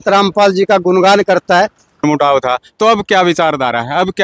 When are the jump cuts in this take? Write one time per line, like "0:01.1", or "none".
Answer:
0:02.0